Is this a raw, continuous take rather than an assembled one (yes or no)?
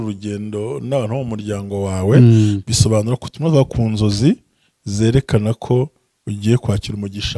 yes